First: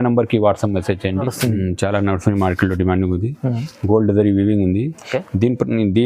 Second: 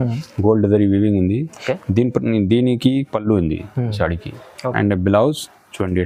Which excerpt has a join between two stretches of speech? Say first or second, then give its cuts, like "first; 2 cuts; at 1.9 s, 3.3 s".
first; 1 cut; at 1.3 s